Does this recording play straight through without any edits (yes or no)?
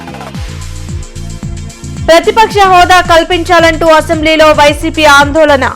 no